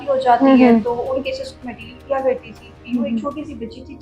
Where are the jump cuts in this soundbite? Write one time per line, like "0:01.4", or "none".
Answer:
0:02.8